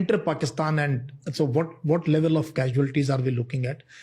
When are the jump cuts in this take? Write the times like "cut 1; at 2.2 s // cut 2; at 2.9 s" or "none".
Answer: none